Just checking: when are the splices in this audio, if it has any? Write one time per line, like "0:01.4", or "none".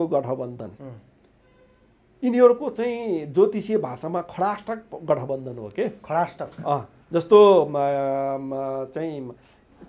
none